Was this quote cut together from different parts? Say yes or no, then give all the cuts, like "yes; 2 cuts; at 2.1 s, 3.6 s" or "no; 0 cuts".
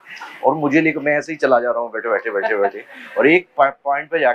no; 0 cuts